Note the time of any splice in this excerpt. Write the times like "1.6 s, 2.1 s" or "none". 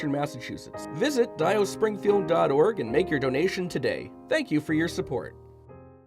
4.1 s, 5.3 s